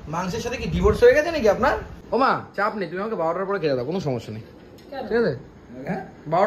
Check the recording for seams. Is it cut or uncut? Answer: cut